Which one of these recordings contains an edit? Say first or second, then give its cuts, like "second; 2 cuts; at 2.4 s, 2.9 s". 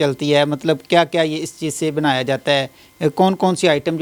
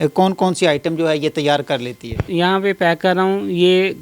second; 1 cut; at 2.3 s